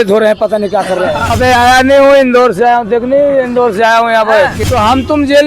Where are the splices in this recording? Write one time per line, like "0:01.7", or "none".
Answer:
0:01.3
0:04.6